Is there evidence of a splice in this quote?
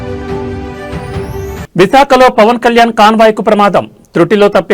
no; 0 cuts

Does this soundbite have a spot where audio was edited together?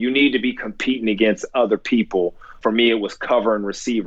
yes; 1 cut; at 2.6 s

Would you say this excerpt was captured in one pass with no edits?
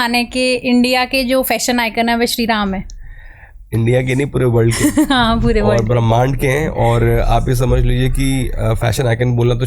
yes; 0 cuts

